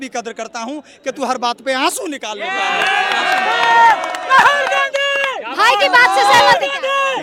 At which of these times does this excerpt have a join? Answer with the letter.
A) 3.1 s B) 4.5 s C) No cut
C